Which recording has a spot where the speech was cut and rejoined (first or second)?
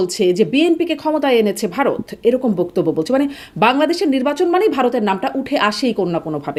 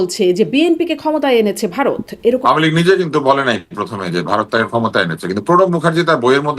second